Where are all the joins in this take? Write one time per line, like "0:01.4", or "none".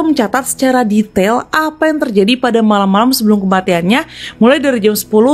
none